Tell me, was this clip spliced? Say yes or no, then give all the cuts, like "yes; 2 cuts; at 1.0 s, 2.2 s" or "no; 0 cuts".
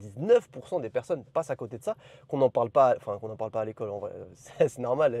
no; 0 cuts